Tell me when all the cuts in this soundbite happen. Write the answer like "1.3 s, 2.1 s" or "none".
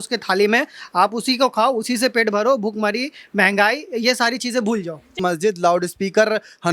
5.2 s